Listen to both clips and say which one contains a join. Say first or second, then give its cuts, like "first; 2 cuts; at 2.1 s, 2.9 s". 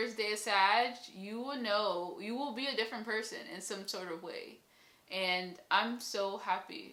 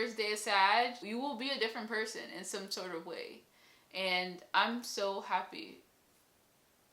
second; 1 cut; at 1.0 s